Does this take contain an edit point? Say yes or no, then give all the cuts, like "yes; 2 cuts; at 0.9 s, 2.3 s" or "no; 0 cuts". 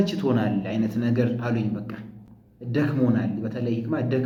no; 0 cuts